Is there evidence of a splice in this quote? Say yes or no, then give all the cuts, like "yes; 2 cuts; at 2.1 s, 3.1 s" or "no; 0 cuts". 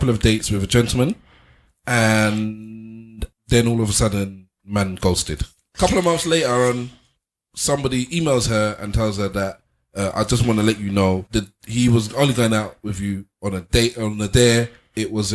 yes; 3 cuts; at 3.2 s, 5.7 s, 11.2 s